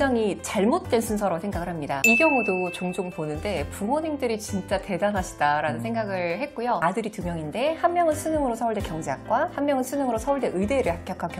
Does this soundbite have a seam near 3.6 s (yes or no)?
no